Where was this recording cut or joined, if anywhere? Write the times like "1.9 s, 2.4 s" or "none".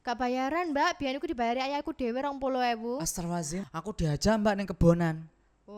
3.6 s

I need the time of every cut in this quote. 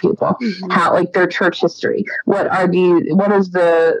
none

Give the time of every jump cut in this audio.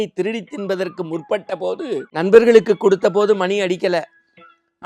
2.1 s

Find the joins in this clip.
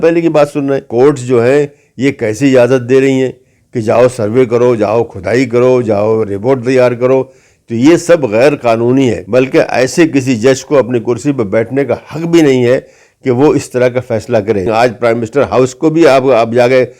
0.9 s, 9.2 s, 14.7 s

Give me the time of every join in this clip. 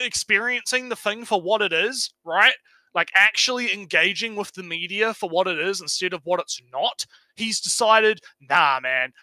none

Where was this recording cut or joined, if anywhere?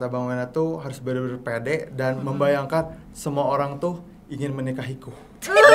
none

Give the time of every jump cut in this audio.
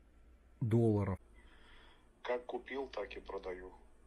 1.2 s

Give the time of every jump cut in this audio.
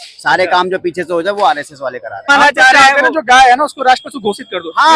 2.3 s

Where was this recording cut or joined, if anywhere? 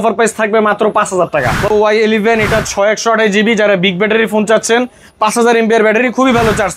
1.7 s

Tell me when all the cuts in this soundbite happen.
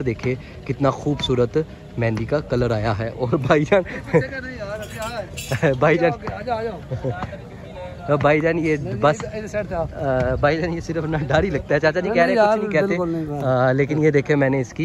none

